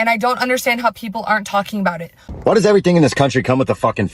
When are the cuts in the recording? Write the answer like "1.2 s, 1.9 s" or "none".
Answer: 2.2 s